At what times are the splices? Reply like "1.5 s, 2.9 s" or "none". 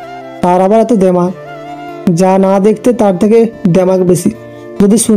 1.7 s